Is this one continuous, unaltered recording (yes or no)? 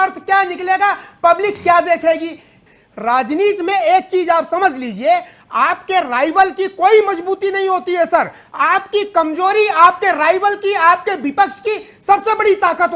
no